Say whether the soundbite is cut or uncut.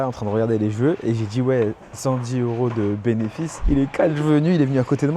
cut